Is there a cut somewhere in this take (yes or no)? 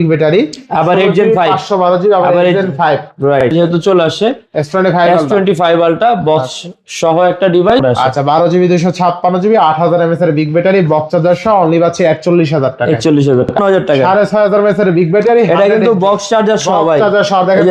yes